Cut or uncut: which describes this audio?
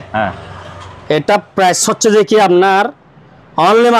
uncut